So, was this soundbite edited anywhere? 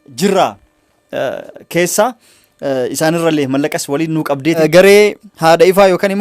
yes; 1 cut; at 4.6 s

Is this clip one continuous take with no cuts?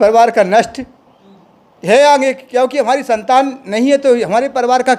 yes; 0 cuts

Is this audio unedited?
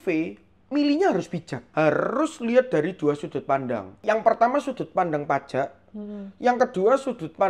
no; 2 cuts; at 1.7 s, 4.0 s

